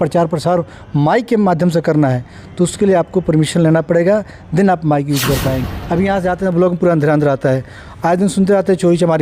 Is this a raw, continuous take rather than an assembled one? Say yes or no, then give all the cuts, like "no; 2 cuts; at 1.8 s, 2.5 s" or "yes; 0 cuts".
no; 1 cut; at 5.7 s